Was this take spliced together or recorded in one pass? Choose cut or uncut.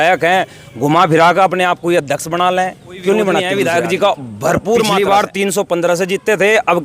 cut